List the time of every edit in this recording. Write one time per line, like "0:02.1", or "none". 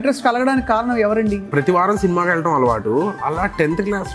0:01.4

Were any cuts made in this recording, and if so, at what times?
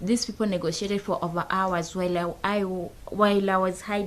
none

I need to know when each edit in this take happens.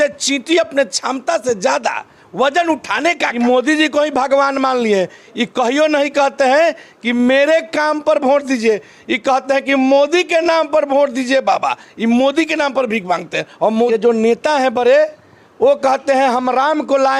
0:03.3
0:13.9

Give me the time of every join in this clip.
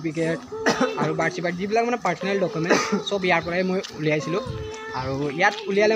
none

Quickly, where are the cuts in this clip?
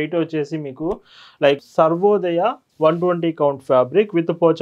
0:01.6

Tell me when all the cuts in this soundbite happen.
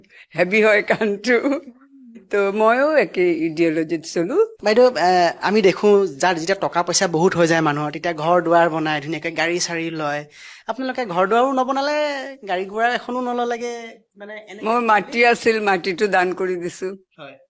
0:04.6

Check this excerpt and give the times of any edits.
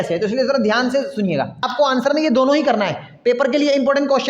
0:01.6

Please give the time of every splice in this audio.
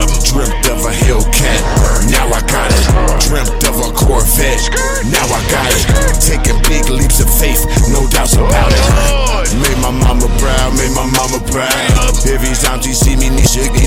none

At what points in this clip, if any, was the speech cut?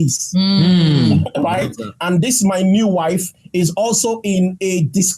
none

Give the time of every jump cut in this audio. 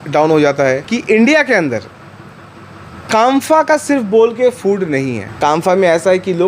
0:00.9
0:05.3

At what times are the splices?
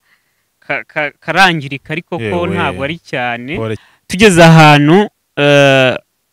0:03.8

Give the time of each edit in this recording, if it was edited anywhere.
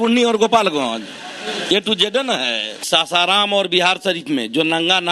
0:02.8

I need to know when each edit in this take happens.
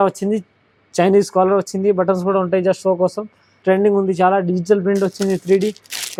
none

